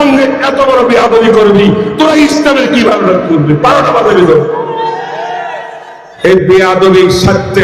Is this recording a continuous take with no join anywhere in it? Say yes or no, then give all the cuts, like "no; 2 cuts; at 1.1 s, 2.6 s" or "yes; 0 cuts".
no; 1 cut; at 6.0 s